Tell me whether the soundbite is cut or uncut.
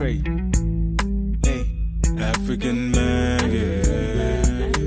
uncut